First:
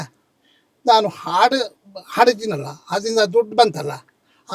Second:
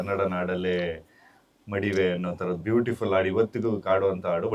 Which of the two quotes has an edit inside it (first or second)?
second